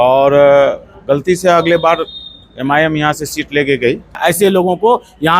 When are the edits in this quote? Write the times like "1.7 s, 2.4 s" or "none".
4.2 s